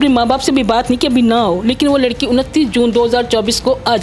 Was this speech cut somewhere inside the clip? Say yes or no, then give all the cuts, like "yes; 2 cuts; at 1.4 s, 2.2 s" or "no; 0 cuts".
no; 0 cuts